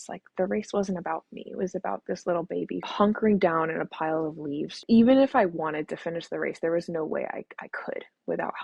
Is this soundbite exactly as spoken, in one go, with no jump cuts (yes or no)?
no